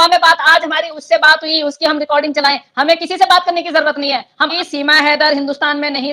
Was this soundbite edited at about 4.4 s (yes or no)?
yes